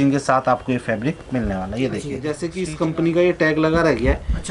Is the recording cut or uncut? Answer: cut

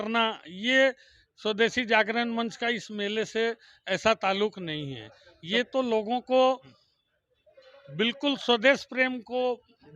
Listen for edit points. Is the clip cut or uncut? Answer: uncut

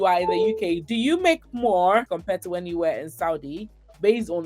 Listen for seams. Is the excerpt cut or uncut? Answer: cut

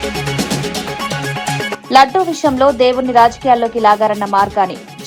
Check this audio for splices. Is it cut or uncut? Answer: uncut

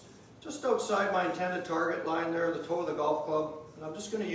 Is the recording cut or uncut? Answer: uncut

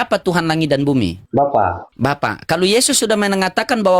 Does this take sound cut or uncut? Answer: cut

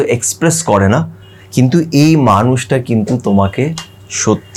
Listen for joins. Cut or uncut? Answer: uncut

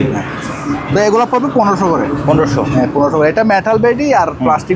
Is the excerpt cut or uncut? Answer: uncut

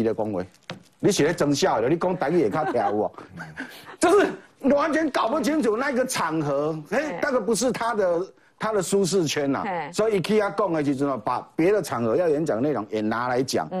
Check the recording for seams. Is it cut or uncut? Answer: uncut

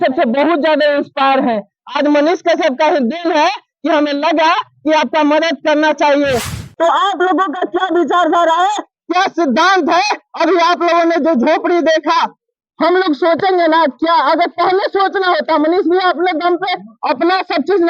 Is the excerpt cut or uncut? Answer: cut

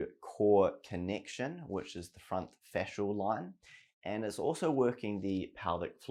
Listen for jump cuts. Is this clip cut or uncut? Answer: uncut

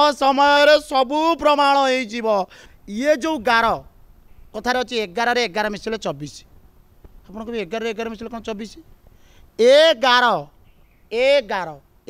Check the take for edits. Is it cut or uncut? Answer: cut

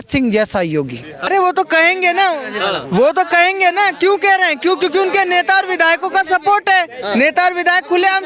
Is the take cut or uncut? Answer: cut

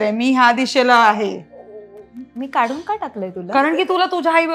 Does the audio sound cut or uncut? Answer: uncut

